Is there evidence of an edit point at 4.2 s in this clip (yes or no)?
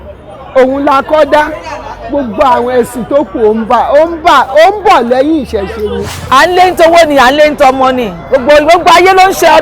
no